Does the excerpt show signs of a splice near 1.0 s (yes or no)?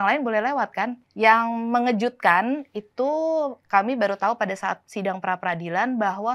yes